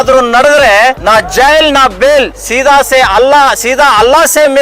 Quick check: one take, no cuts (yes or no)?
no